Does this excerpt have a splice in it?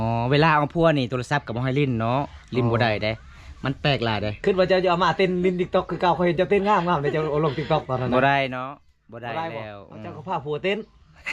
no; 0 cuts

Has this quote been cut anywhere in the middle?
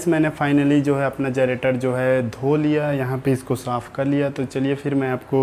no; 0 cuts

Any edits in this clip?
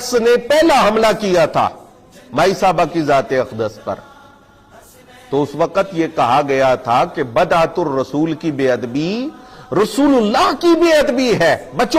no; 0 cuts

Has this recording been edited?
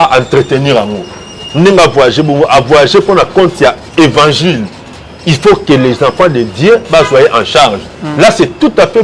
no; 0 cuts

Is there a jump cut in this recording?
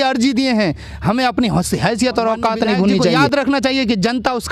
yes; 1 cut; at 3.2 s

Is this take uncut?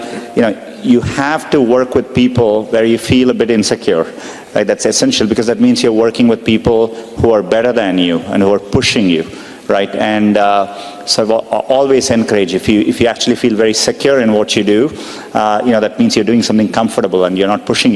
yes; 0 cuts

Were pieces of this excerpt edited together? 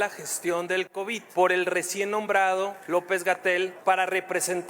yes; 3 cuts; at 1.2 s, 2.8 s, 3.8 s

